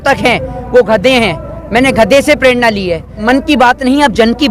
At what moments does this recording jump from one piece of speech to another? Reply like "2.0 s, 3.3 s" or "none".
3.1 s